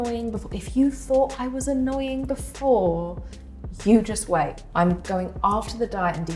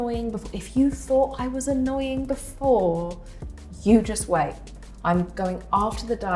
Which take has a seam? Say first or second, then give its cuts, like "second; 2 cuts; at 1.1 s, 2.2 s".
first; 1 cut; at 4.6 s